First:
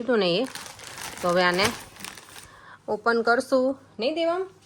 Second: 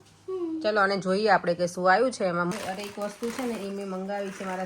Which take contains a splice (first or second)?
second